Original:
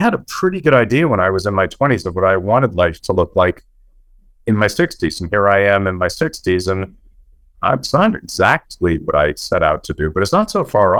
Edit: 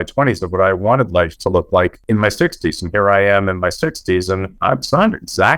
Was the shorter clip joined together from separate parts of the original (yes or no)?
yes